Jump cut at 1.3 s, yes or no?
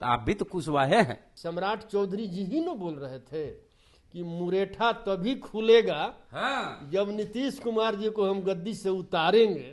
yes